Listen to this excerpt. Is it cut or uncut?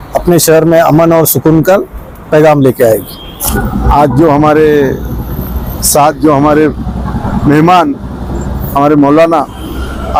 uncut